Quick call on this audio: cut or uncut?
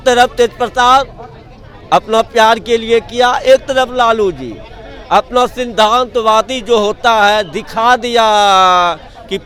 uncut